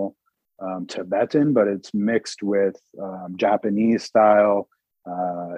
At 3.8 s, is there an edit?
no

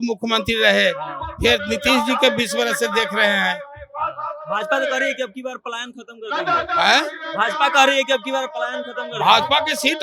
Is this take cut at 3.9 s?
no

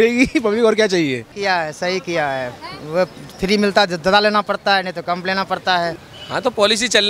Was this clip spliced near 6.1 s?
yes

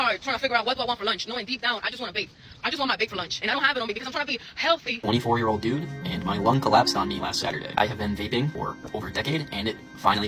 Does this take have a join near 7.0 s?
no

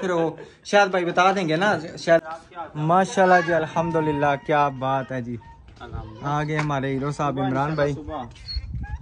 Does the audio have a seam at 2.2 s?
yes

